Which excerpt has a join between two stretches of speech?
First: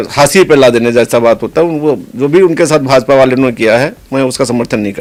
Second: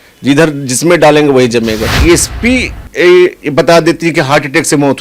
second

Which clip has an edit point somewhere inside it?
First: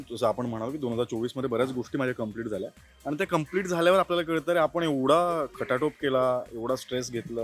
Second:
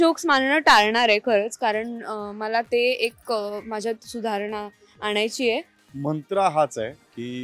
second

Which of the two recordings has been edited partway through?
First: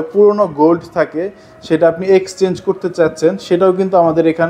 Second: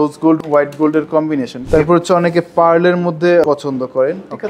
second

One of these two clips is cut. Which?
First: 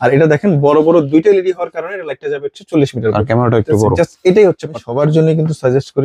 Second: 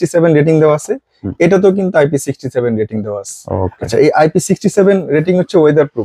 first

